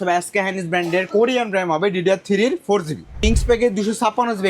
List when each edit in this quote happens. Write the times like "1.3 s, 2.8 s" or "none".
3.2 s

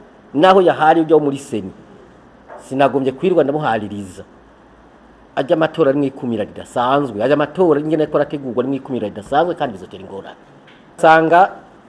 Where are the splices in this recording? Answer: 11.0 s

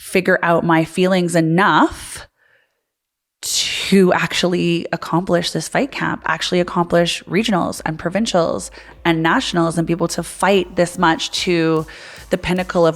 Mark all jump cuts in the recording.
none

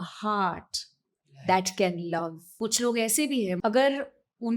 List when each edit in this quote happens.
2.6 s, 3.6 s

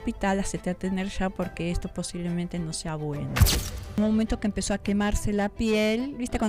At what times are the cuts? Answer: 3.6 s

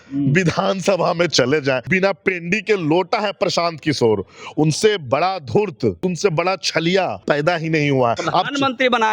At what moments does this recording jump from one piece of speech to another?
1.9 s, 6.0 s, 7.2 s, 8.2 s

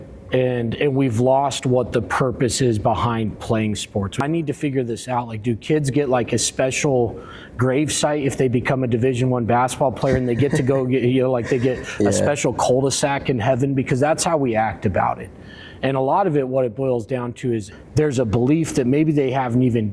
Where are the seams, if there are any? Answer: 4.2 s, 17.7 s

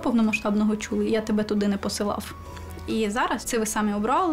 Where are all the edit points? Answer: 1.1 s, 3.5 s

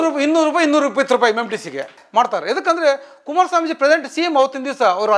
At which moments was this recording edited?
2.0 s

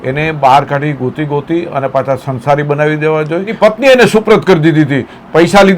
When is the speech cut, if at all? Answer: 3.5 s

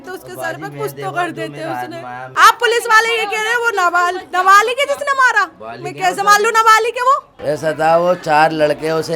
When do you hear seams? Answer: 2.2 s, 7.3 s

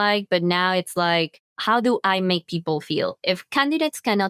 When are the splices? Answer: 1.5 s

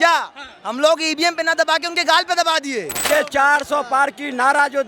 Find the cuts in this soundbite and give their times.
3.0 s

